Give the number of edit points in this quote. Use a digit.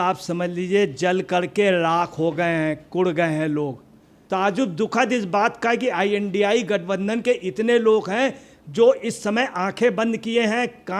1